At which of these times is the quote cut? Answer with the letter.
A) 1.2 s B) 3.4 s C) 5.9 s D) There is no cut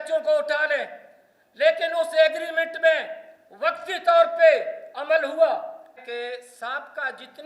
C